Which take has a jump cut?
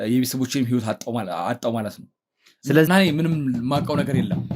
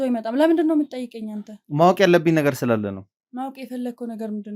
first; 1 cut; at 2.9 s

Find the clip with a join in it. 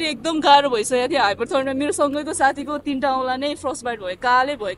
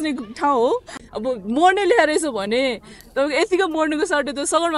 second; 1 cut; at 1.0 s

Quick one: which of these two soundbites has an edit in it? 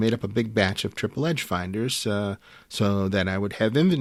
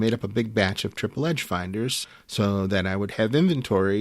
second; 1 cut; at 2.0 s

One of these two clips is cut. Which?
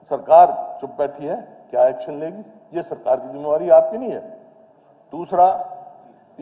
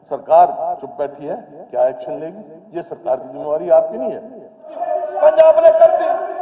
second; 1 cut; at 4.8 s

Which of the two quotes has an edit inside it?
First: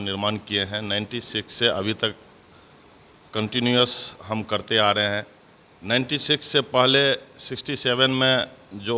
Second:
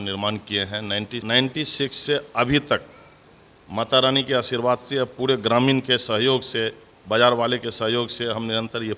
second; 1 cut; at 1.2 s

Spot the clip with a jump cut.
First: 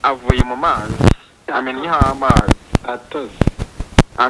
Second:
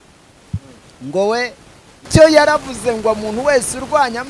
second; 1 cut; at 2.1 s

